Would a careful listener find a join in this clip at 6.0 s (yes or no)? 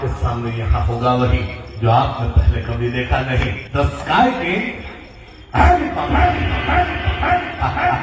no